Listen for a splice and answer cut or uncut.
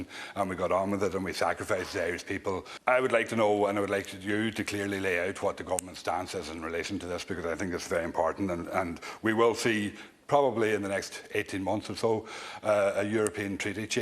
cut